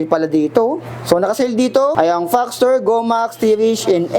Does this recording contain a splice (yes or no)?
yes